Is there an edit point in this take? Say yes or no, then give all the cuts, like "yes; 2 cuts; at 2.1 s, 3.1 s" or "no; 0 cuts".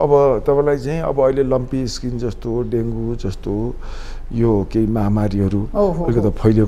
no; 0 cuts